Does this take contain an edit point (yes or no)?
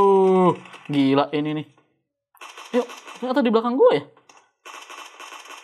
no